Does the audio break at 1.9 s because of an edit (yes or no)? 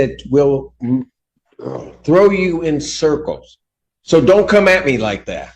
no